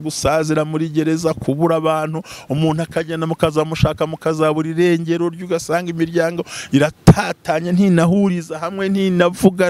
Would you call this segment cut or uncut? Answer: uncut